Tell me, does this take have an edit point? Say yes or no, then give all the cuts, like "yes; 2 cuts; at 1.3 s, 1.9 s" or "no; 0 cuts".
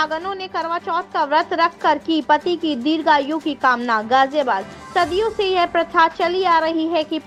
no; 0 cuts